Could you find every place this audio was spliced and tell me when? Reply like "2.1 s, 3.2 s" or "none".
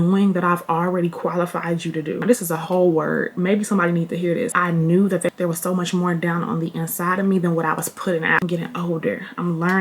2.2 s, 4.5 s, 8.4 s